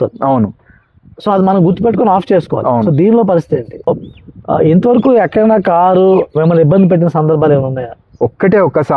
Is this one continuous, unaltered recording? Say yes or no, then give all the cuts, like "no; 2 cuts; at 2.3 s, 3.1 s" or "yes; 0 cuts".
no; 2 cuts; at 3.9 s, 8.0 s